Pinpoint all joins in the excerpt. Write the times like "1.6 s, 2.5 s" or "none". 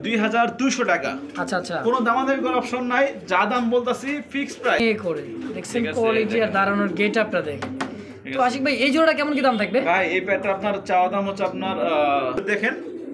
4.8 s, 12.4 s